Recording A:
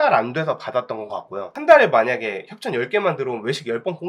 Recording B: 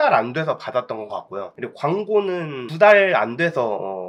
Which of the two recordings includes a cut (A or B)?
A